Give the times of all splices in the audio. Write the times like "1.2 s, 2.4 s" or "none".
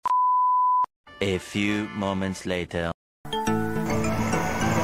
1.0 s, 3.2 s